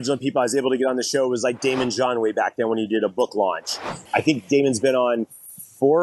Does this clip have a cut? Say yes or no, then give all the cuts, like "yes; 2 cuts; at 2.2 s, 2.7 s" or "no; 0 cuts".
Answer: yes; 1 cut; at 4.0 s